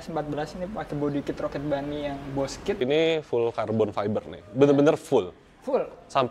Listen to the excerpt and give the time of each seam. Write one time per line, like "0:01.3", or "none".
0:02.8